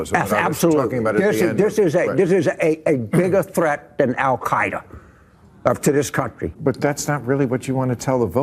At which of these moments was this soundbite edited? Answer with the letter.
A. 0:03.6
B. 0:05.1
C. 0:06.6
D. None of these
C